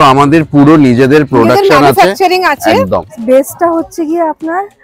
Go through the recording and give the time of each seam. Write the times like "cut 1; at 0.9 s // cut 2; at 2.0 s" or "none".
cut 1; at 3.1 s